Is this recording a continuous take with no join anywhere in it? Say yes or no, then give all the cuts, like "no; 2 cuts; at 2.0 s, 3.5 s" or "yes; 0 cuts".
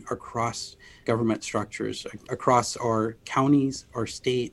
no; 2 cuts; at 1.0 s, 2.2 s